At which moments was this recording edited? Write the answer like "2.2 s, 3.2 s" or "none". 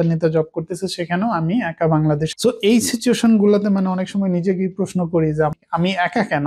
2.3 s, 5.5 s

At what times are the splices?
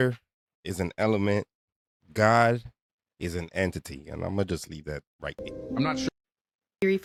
none

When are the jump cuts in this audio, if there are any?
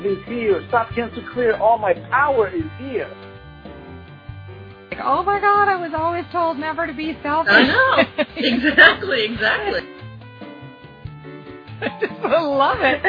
none

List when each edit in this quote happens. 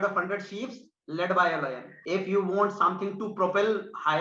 1.9 s

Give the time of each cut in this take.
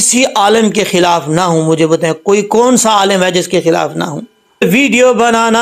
4.6 s

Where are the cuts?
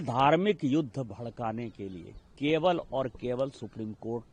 none

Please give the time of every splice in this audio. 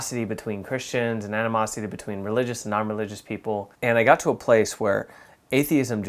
3.7 s

